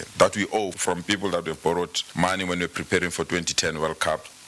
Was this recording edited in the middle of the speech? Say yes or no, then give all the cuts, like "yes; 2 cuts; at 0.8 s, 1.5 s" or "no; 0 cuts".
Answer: no; 0 cuts